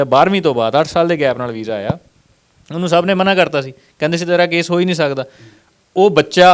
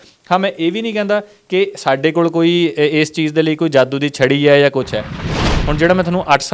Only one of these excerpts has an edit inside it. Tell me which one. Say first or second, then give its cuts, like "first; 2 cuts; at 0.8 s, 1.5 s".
second; 1 cut; at 5.3 s